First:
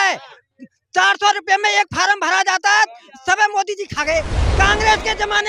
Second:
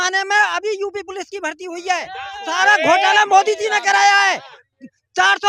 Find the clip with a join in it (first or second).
first